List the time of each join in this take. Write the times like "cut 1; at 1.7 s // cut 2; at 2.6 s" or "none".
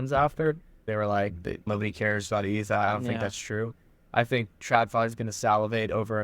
cut 1; at 0.9 s // cut 2; at 1.7 s